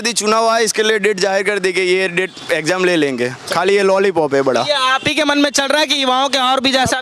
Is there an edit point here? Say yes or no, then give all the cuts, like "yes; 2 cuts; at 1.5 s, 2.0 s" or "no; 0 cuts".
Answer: no; 0 cuts